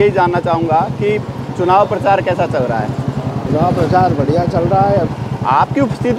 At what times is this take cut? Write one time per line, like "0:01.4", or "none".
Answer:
0:03.5
0:05.1